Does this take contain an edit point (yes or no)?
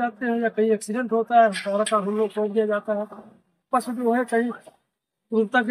no